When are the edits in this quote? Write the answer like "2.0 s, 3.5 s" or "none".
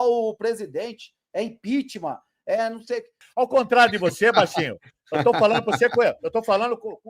3.3 s